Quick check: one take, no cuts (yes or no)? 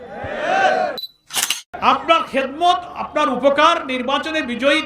no